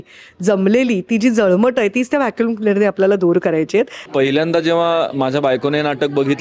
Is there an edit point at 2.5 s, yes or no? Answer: no